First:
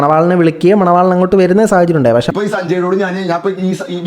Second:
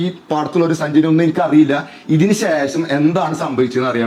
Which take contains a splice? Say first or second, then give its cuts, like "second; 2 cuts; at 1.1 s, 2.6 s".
first; 1 cut; at 2.3 s